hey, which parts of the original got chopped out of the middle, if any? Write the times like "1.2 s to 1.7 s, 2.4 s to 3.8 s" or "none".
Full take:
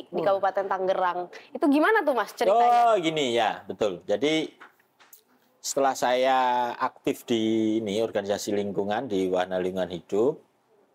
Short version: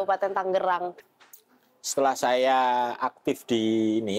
1.4 s to 4.8 s